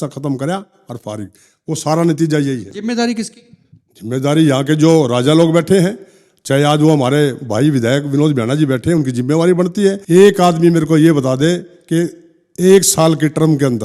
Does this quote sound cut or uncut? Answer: cut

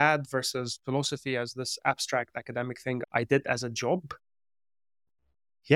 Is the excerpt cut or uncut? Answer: cut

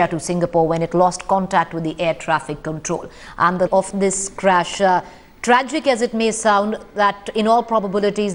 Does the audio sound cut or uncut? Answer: uncut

